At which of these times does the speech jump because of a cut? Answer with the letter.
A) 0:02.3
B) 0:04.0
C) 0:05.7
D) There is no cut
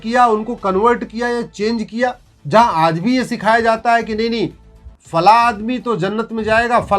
A